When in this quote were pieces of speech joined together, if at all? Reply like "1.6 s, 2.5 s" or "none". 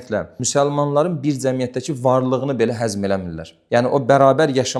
none